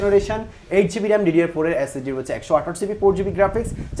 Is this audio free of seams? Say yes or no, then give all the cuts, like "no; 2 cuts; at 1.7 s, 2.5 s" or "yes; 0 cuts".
yes; 0 cuts